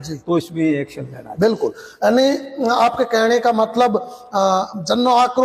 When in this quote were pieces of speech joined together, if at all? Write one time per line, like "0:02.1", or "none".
none